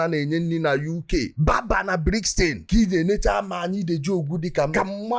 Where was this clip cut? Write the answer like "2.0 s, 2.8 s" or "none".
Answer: 2.7 s